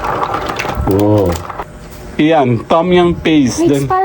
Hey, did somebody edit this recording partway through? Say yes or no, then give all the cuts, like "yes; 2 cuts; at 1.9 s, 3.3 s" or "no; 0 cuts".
yes; 1 cut; at 1.5 s